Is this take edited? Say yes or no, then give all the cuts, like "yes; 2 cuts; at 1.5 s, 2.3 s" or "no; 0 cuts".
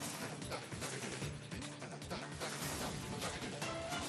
no; 0 cuts